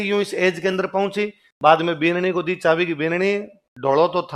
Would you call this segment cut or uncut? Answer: uncut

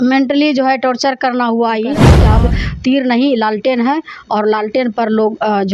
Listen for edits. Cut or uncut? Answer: cut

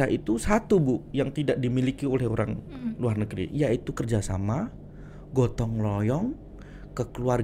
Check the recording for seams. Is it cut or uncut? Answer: uncut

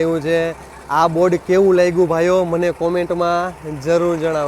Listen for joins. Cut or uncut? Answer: uncut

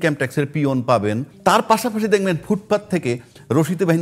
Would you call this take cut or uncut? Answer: cut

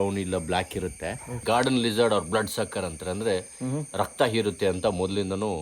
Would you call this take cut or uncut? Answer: cut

